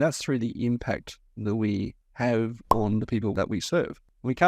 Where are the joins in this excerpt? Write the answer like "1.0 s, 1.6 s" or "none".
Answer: 3.3 s